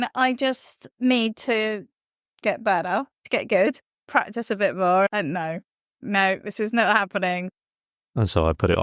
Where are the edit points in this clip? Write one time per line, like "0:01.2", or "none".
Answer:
0:03.2
0:04.0
0:06.0
0:07.5